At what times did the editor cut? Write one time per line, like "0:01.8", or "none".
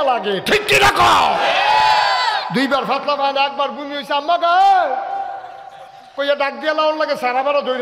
0:02.5